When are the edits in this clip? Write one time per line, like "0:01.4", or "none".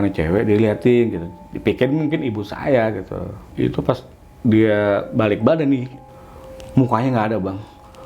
0:03.4
0:06.0